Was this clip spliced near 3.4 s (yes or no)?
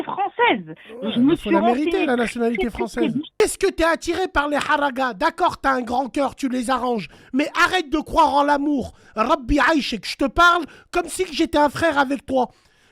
yes